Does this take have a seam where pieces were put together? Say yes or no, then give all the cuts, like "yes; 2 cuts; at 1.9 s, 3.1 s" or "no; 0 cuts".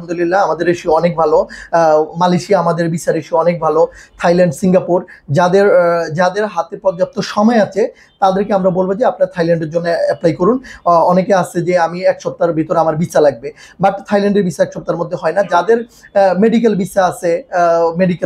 no; 0 cuts